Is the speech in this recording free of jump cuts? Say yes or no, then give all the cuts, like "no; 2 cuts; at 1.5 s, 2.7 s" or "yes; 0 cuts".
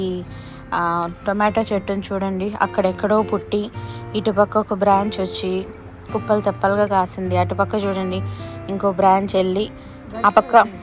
yes; 0 cuts